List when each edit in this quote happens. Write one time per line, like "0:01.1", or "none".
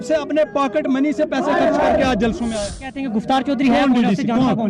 0:02.9